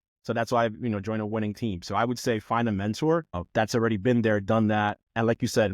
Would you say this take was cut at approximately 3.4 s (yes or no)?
yes